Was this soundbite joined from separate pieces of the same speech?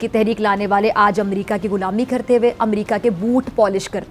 no; 0 cuts

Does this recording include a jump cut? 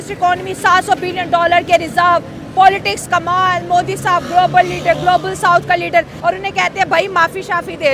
yes; 1 cut; at 6.1 s

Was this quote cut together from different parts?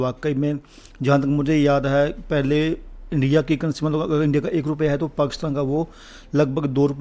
no; 0 cuts

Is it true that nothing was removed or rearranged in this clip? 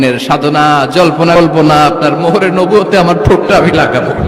no; 1 cut; at 1.4 s

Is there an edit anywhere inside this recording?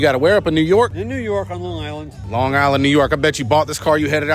yes; 2 cuts; at 0.9 s, 2.1 s

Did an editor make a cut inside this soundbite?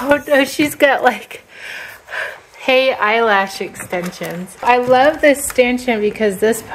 yes; 1 cut; at 4.6 s

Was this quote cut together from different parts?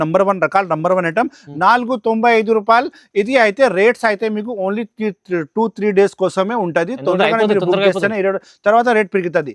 no; 0 cuts

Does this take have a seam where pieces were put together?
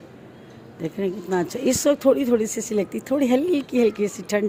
no; 0 cuts

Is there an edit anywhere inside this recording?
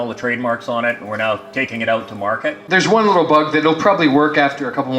yes; 1 cut; at 2.7 s

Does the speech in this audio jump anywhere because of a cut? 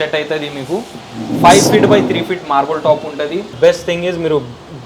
yes; 1 cut; at 3.5 s

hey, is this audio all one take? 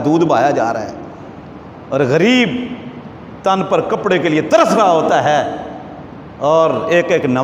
yes; 0 cuts

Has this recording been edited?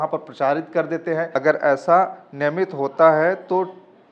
yes; 1 cut; at 1.3 s

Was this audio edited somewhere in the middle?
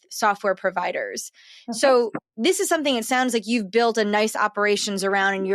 no; 0 cuts

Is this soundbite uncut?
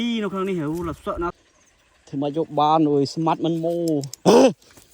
no; 1 cut; at 1.4 s

